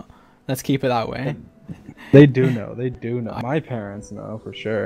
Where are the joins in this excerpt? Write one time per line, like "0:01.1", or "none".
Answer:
0:03.4